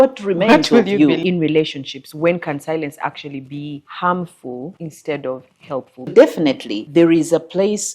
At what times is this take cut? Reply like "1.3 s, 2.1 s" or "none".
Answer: 1.2 s, 3.9 s, 4.8 s, 6.1 s, 6.7 s